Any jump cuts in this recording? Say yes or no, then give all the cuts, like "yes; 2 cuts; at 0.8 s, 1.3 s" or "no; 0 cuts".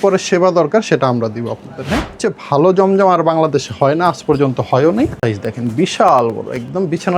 yes; 2 cuts; at 2.2 s, 5.2 s